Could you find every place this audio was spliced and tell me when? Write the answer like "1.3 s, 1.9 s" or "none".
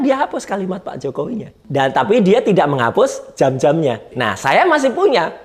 1.6 s, 4.1 s